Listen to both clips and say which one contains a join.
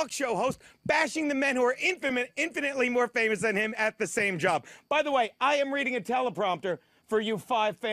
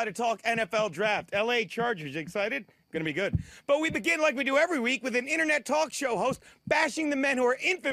first; 1 cut; at 6.3 s

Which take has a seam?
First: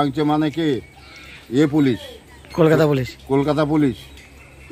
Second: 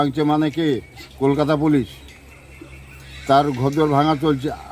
second; 1 cut; at 1.0 s

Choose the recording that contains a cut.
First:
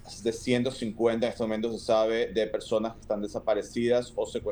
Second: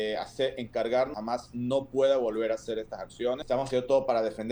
second; 2 cuts; at 1.1 s, 3.4 s

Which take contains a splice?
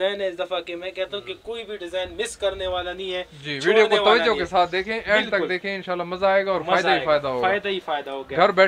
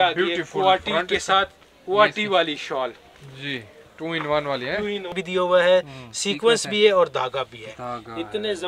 second; 1 cut; at 5.1 s

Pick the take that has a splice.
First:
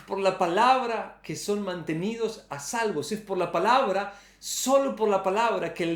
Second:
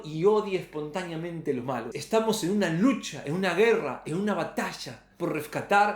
second; 1 cut; at 1.9 s

